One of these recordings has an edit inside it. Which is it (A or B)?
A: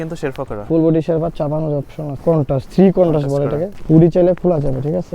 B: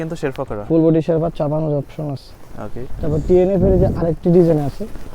A